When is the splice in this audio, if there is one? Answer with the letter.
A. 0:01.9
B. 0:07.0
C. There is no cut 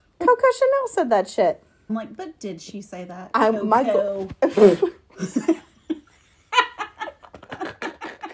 A